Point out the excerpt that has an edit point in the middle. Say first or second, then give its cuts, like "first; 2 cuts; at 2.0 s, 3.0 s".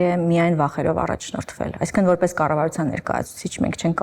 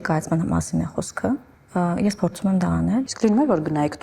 second; 2 cuts; at 1.6 s, 3.1 s